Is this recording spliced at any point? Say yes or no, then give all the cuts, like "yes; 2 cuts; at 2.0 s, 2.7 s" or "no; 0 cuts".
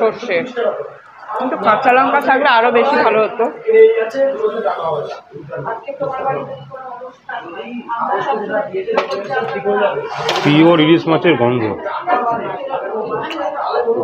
yes; 1 cut; at 4.4 s